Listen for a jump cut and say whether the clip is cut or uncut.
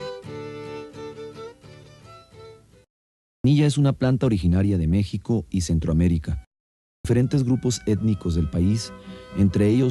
cut